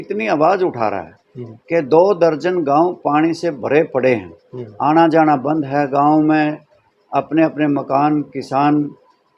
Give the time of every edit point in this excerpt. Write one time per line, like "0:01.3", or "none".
none